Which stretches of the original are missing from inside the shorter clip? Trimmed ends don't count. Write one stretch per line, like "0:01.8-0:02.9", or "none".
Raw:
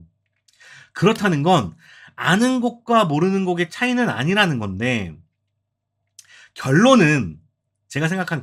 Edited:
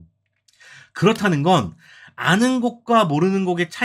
none